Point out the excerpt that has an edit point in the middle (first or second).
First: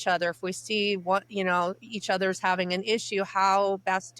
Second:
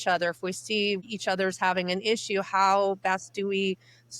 second